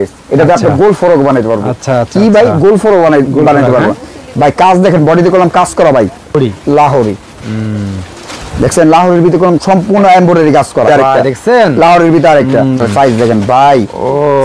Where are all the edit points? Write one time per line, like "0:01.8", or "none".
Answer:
0:06.3
0:10.9
0:12.8